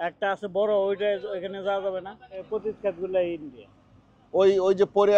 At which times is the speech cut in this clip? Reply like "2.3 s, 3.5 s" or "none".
2.5 s